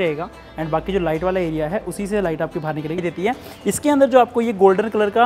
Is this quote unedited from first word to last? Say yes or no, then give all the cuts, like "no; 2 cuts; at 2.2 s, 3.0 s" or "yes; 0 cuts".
no; 1 cut; at 3.0 s